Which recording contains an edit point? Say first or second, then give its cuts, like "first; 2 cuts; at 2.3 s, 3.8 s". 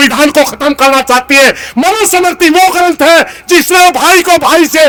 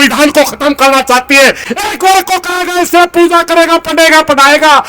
second; 1 cut; at 1.6 s